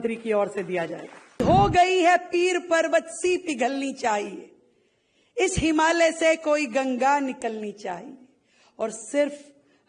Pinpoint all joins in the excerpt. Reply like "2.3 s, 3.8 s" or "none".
1.4 s